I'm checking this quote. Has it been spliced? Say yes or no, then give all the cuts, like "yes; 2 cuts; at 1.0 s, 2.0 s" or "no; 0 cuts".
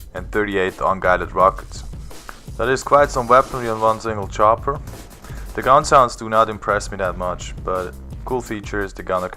yes; 1 cut; at 4.5 s